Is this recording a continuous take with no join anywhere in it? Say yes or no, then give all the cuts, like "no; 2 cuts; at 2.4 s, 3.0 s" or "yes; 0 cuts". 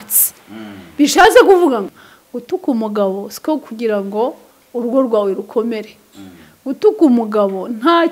no; 1 cut; at 1.9 s